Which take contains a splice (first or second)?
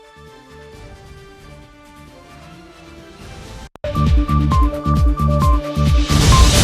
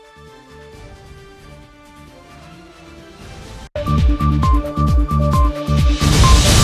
first